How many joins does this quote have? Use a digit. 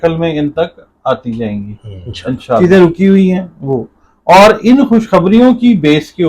1